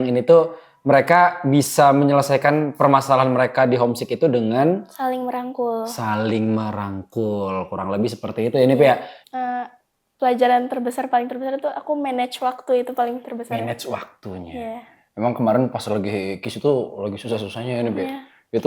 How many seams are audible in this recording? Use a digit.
1